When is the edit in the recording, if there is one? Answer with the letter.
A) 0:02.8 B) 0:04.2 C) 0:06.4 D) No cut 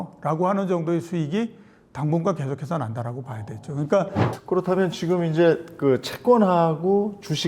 B